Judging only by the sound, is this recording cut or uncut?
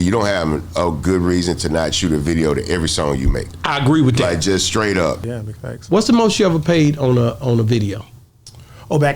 cut